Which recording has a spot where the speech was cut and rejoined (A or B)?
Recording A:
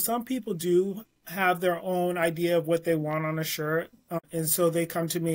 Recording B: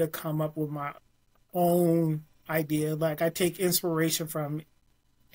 A